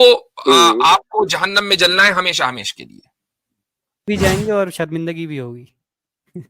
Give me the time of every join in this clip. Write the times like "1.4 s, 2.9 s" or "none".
4.0 s